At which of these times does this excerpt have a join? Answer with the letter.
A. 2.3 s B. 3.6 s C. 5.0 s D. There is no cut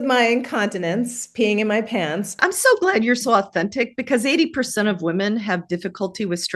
A